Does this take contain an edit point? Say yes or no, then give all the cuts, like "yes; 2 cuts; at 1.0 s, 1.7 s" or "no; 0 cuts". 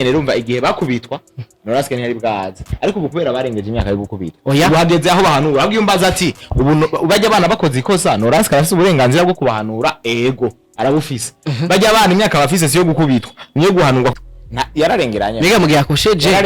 yes; 1 cut; at 14.1 s